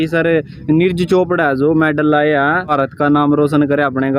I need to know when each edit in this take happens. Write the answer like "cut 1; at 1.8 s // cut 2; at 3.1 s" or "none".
cut 1; at 2.6 s